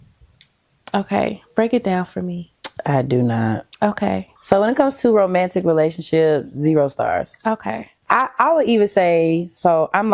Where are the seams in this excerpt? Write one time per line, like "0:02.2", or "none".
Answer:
0:04.3
0:07.9